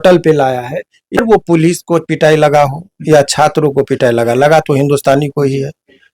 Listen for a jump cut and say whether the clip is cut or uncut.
cut